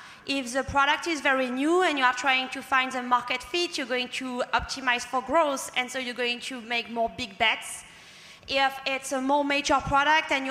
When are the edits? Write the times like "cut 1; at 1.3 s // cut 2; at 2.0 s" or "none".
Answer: none